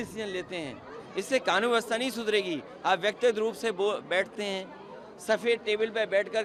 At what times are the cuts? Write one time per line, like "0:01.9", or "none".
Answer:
none